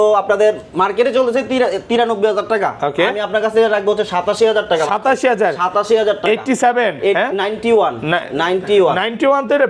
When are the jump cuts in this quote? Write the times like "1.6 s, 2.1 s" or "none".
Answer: none